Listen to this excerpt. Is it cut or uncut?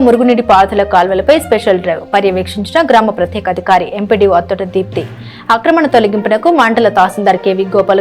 uncut